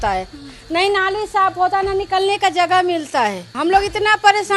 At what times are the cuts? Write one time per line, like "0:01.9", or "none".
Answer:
0:03.5